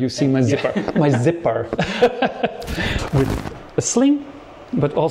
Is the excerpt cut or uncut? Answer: cut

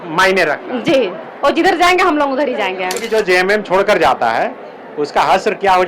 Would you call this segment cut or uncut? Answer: cut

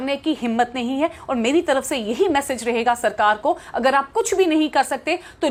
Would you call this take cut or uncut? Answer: uncut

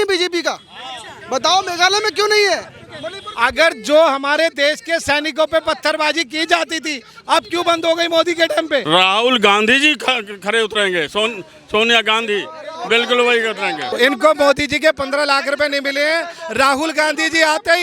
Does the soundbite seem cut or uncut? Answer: cut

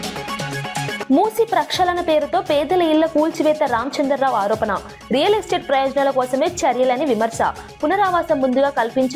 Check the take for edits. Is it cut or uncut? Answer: uncut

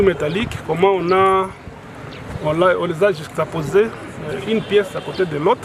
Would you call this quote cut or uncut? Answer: uncut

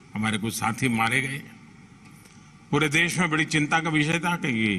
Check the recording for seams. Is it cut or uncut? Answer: uncut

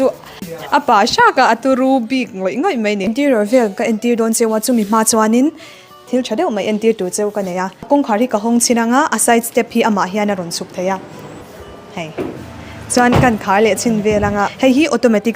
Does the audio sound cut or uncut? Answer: cut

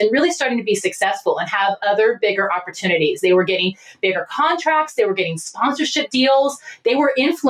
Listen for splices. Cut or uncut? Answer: uncut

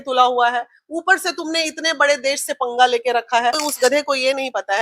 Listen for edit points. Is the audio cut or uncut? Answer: cut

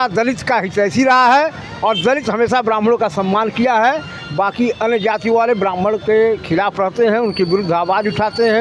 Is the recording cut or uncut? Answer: uncut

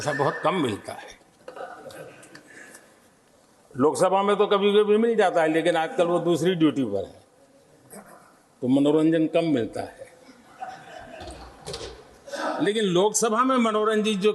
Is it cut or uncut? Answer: uncut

